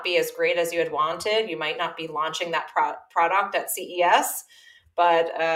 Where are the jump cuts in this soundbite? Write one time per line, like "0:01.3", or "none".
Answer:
none